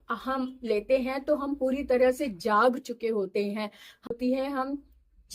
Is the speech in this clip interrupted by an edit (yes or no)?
yes